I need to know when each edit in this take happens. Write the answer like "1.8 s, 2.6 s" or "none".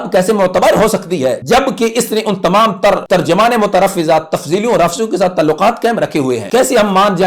1.4 s, 3.0 s, 6.4 s

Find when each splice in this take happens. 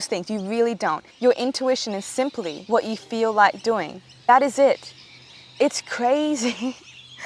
1.1 s, 2.6 s, 4.3 s

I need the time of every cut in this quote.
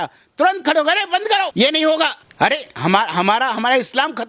1.5 s, 2.2 s

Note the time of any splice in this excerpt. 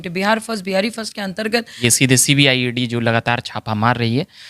1.8 s

